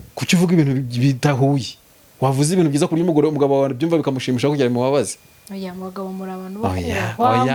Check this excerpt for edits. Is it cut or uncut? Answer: uncut